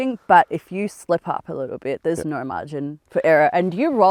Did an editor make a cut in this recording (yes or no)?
no